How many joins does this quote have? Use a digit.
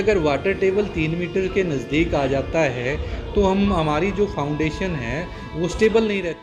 0